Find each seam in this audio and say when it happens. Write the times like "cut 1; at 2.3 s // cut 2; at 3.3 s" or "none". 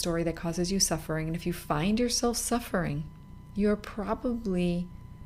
none

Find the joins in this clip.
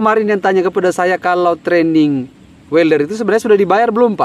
none

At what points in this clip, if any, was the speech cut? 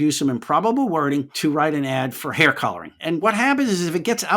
cut 1; at 1.3 s // cut 2; at 3.2 s

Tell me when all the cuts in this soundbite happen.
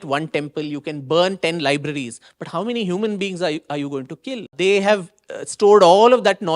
cut 1; at 4.5 s

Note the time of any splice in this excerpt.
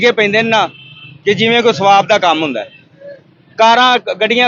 none

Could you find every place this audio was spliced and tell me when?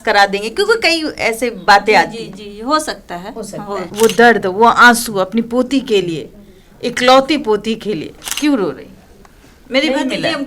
cut 1; at 3.9 s // cut 2; at 8.1 s

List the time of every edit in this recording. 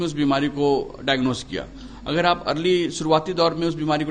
none

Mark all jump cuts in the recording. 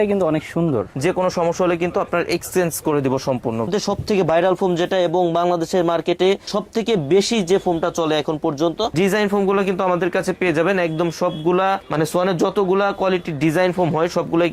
cut 1; at 0.9 s // cut 2; at 3.7 s // cut 3; at 8.9 s

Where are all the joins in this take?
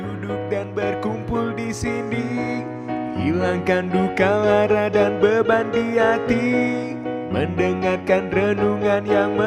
none

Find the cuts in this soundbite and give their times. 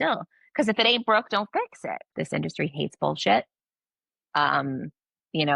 cut 1; at 2.1 s

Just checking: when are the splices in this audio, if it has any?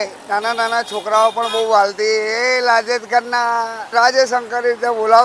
cut 1; at 3.9 s

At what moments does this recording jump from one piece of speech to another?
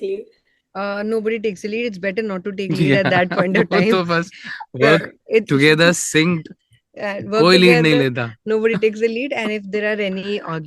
none

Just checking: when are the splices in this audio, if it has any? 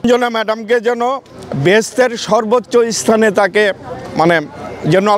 none

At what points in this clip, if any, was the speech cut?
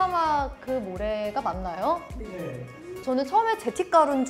cut 1; at 2.9 s

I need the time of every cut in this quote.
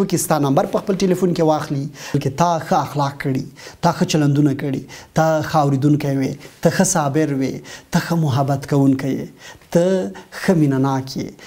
cut 1; at 2.2 s

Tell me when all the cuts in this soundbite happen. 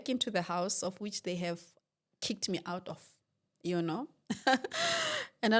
none

